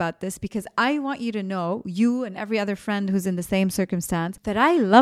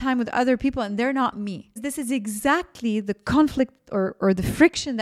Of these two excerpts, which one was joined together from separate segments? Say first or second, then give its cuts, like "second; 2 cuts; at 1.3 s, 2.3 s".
second; 1 cut; at 1.7 s